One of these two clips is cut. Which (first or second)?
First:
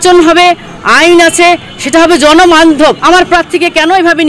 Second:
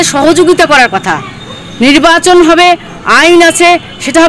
first